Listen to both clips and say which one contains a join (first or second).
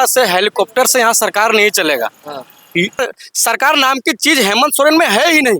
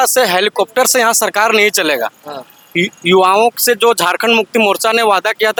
first